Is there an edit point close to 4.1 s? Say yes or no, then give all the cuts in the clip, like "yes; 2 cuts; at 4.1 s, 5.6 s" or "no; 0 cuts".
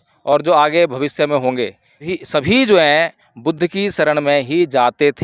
no; 1 cut; at 2.1 s